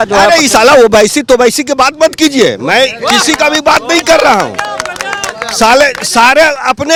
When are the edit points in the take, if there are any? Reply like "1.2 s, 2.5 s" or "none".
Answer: none